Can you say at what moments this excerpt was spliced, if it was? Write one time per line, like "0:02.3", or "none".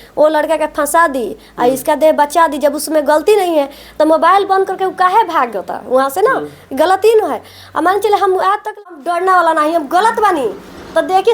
0:08.7

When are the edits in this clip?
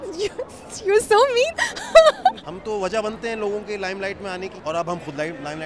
0:02.5
0:04.6

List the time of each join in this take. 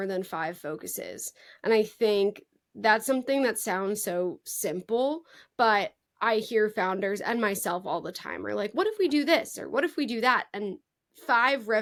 none

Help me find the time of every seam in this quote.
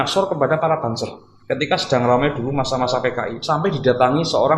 0:03.4

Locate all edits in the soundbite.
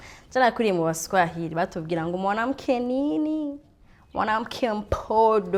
none

